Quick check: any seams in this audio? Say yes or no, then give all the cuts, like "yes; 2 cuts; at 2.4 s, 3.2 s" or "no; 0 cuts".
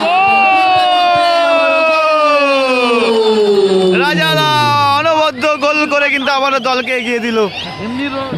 no; 0 cuts